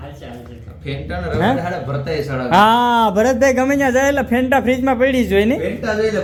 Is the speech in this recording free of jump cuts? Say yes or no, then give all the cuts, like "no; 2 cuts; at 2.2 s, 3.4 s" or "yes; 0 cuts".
yes; 0 cuts